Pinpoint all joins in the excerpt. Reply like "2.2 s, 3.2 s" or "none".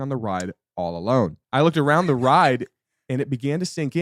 1.4 s